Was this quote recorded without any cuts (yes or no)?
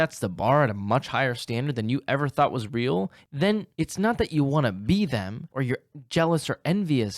no